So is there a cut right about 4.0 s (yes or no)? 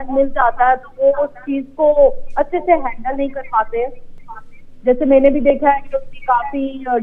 no